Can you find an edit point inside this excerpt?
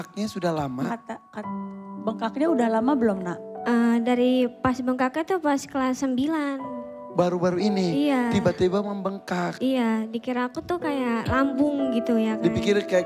no; 0 cuts

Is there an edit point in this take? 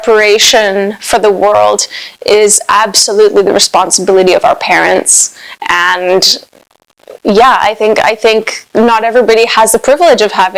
no; 0 cuts

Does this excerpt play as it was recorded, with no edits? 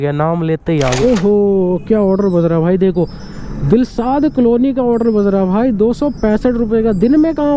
no; 1 cut; at 1.0 s

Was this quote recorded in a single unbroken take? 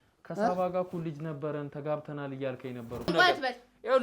no; 1 cut; at 3.1 s

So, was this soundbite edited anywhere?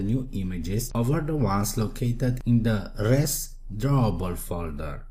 yes; 1 cut; at 1.2 s

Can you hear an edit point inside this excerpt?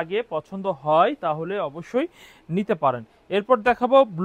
no; 0 cuts

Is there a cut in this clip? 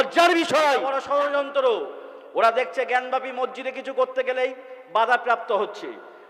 yes; 1 cut; at 0.9 s

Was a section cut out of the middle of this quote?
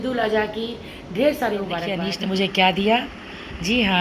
yes; 1 cut; at 2.0 s

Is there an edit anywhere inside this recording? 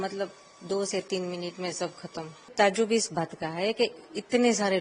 yes; 1 cut; at 2.5 s

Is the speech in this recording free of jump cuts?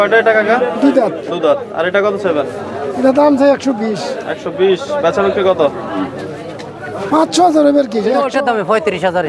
no; 1 cut; at 8.3 s

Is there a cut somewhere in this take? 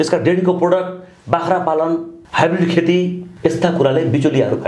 yes; 2 cuts; at 2.2 s, 3.2 s

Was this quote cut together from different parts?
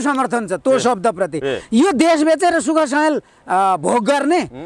no; 0 cuts

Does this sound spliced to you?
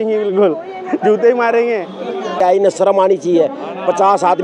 yes; 1 cut; at 2.4 s

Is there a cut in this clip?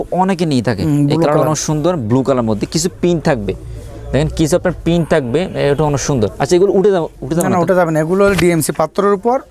no; 0 cuts

